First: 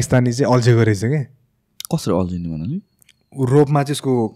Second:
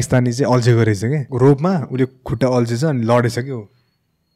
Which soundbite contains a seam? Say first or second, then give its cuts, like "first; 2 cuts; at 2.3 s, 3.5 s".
second; 1 cut; at 1.3 s